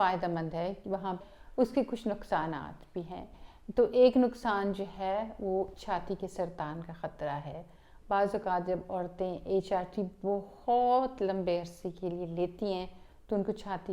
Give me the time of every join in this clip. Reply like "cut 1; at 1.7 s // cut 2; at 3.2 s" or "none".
cut 1; at 1.3 s